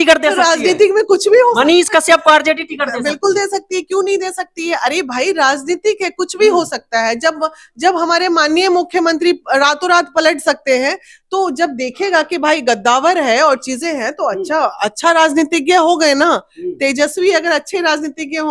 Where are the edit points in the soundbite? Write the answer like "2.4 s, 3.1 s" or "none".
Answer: none